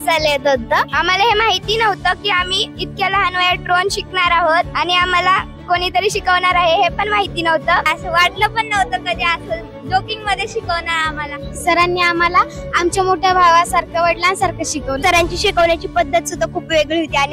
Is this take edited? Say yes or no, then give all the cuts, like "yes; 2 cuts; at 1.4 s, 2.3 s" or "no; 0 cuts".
no; 0 cuts